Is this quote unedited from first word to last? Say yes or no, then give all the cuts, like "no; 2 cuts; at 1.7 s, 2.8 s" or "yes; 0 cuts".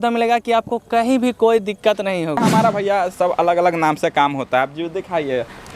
no; 1 cut; at 2.4 s